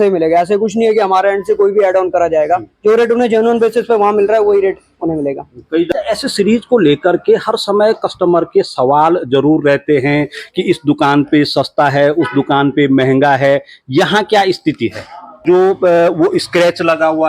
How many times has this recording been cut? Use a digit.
2